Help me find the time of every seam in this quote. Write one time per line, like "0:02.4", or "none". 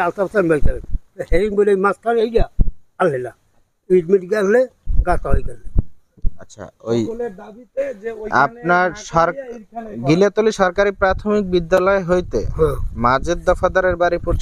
none